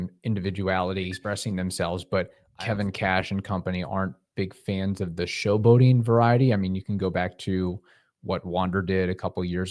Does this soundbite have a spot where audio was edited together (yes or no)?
yes